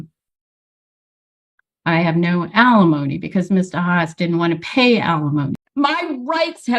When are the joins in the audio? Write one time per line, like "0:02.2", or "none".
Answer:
0:05.6